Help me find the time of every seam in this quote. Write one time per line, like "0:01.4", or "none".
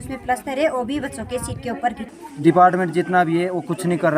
0:02.0